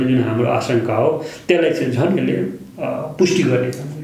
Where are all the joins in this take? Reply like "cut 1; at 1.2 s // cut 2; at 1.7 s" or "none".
none